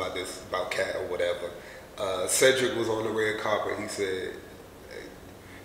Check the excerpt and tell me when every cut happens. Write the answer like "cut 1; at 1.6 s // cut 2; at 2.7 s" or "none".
none